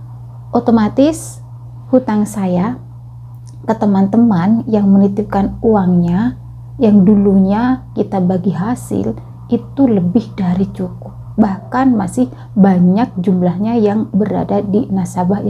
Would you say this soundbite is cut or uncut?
uncut